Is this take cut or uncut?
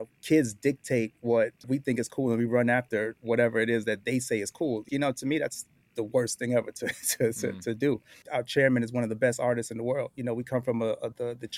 cut